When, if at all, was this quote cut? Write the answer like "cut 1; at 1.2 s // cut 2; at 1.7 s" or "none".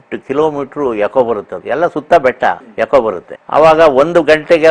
cut 1; at 1.5 s // cut 2; at 2.7 s // cut 3; at 3.3 s